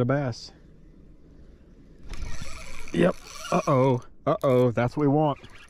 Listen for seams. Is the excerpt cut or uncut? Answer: uncut